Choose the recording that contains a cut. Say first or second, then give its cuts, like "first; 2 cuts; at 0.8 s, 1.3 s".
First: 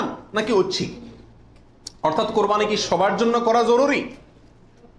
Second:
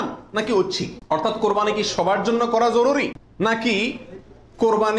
second; 2 cuts; at 0.9 s, 3.2 s